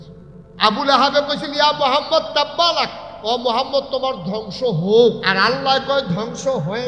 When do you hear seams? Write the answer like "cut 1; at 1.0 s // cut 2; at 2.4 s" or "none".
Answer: cut 1; at 3.1 s // cut 2; at 5.3 s